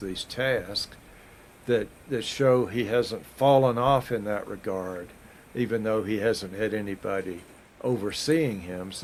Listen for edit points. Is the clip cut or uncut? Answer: uncut